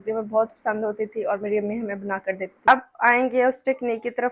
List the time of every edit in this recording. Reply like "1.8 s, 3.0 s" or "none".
2.7 s